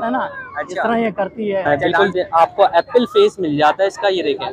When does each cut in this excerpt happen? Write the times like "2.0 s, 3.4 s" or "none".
1.7 s